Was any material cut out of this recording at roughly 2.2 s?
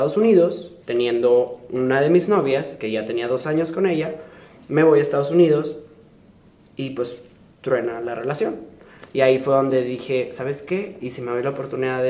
no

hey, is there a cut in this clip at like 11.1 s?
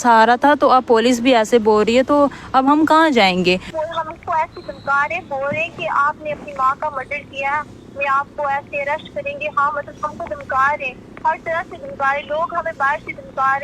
no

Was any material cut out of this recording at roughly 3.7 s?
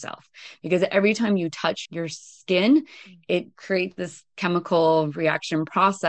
yes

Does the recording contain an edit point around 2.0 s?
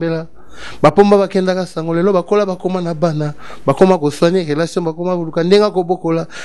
no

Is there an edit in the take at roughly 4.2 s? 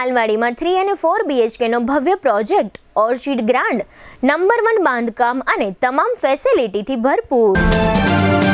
no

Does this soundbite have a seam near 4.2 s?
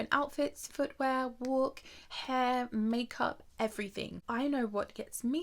yes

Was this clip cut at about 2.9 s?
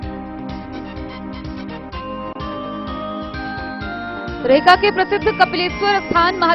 no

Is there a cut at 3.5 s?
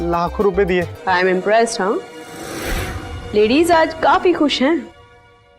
no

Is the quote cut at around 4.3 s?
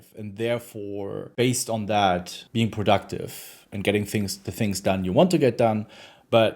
no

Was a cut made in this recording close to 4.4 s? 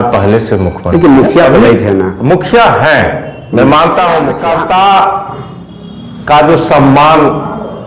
yes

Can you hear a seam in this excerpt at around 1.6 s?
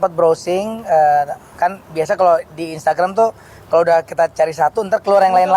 no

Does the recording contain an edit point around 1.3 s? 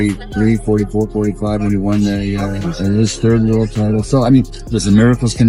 no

